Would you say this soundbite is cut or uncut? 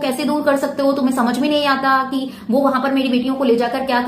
uncut